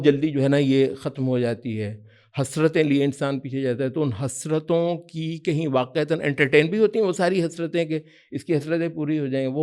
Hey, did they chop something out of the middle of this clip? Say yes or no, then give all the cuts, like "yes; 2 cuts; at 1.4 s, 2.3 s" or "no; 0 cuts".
no; 0 cuts